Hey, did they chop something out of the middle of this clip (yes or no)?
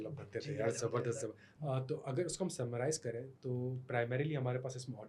yes